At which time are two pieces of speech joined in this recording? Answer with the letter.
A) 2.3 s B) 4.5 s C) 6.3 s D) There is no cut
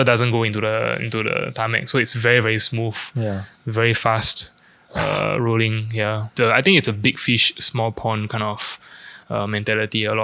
C